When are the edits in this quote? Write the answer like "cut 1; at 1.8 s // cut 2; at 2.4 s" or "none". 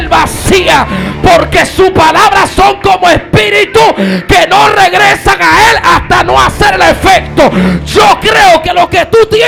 none

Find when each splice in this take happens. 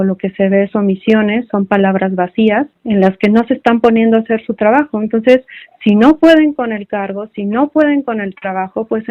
cut 1; at 2.8 s

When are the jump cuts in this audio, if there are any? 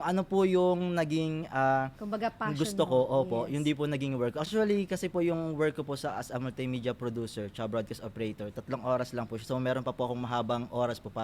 cut 1; at 4.5 s

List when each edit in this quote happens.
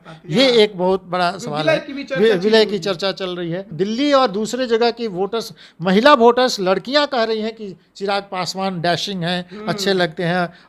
cut 1; at 3.7 s

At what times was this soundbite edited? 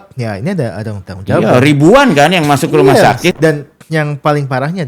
cut 1; at 3.4 s

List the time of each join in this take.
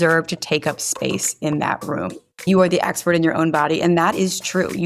cut 1; at 2.5 s

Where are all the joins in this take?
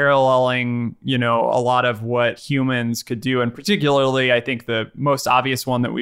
cut 1; at 2.4 s

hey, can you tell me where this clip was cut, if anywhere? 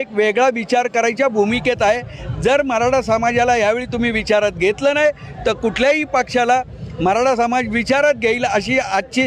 none

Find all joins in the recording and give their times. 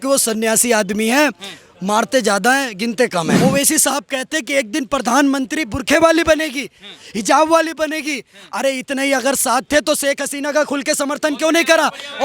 cut 1; at 3.3 s

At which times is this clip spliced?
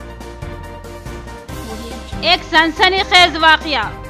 cut 1; at 1.6 s

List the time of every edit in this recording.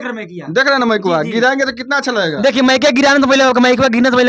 none

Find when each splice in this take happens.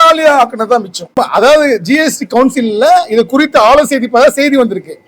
cut 1; at 1.1 s

